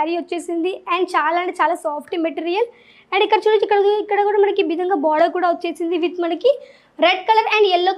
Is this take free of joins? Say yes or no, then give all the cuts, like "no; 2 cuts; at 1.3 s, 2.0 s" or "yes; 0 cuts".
yes; 0 cuts